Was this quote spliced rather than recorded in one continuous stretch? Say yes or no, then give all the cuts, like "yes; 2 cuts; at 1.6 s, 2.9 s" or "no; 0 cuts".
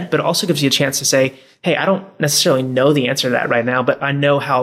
no; 0 cuts